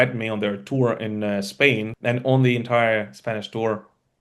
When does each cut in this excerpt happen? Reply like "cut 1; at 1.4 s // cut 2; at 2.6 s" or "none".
cut 1; at 1.9 s